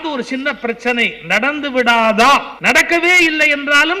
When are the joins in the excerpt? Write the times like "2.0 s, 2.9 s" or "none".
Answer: 2.5 s